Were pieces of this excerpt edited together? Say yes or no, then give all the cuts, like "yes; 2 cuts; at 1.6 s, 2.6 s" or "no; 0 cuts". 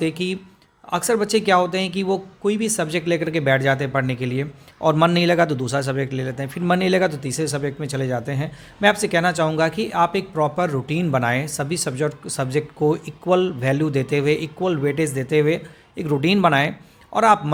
no; 0 cuts